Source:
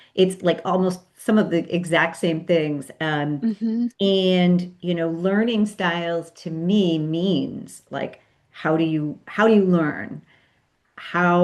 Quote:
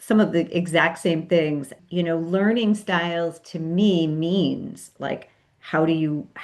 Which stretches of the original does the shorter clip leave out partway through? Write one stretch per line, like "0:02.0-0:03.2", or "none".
0:03.0-0:04.7